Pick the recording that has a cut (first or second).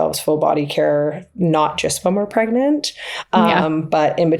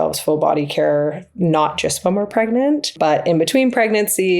second